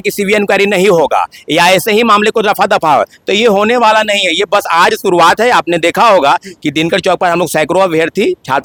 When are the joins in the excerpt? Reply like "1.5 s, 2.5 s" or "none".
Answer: none